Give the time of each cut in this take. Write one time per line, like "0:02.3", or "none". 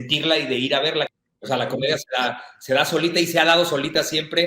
0:01.1